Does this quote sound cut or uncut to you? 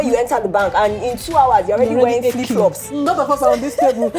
cut